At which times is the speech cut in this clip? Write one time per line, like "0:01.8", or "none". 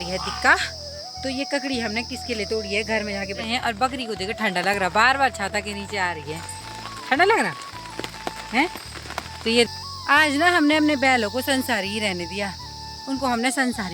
0:03.4
0:09.7